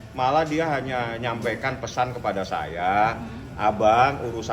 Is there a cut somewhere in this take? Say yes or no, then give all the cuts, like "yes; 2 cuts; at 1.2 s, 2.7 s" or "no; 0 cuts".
no; 0 cuts